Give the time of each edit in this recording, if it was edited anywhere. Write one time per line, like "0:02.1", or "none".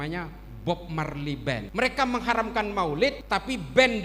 0:01.7
0:03.2